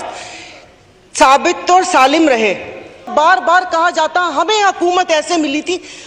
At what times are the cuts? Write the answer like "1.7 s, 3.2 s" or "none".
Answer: 3.1 s